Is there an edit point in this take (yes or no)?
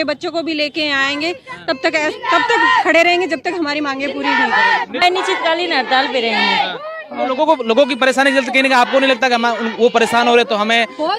yes